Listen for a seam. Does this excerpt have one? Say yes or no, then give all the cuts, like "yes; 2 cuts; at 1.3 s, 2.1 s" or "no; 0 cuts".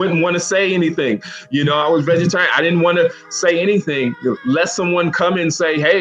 no; 0 cuts